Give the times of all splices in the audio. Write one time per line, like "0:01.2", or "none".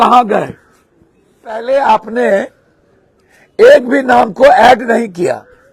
0:01.6